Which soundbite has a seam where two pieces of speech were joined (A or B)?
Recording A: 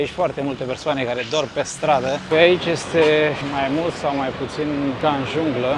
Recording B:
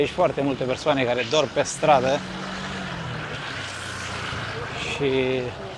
A